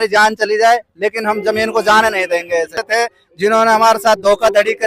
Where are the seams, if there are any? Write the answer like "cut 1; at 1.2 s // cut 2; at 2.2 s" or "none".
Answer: cut 1; at 2.8 s